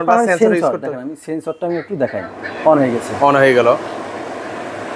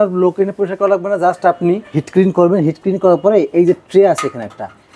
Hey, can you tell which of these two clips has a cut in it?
second; 1 cut; at 1.9 s

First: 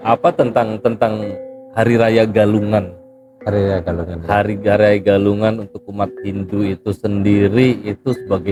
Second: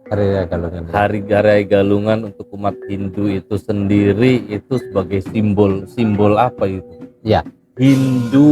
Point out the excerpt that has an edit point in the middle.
second; 1 cut; at 7.6 s

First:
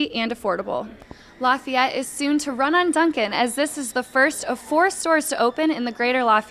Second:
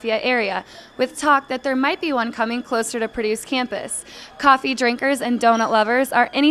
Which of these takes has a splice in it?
first; 1 cut; at 1.2 s

